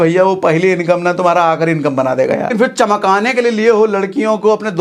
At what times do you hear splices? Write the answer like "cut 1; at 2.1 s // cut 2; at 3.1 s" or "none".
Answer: cut 1; at 2.5 s